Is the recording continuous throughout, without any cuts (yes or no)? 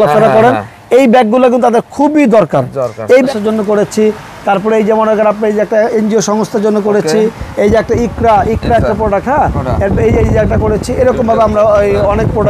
no